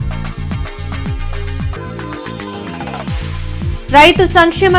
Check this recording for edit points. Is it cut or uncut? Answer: cut